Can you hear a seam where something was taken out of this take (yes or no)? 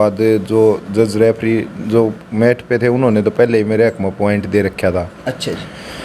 no